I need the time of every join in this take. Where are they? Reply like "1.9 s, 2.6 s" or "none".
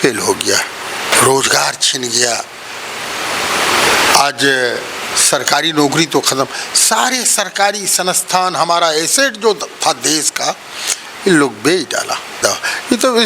1.1 s, 12.4 s